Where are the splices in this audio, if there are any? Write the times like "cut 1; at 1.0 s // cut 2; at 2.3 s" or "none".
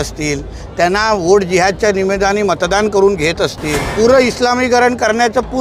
cut 1; at 3.8 s